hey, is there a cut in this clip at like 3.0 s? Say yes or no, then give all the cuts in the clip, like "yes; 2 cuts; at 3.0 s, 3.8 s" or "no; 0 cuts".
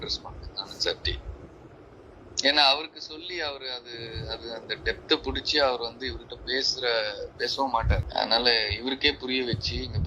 no; 1 cut; at 8.1 s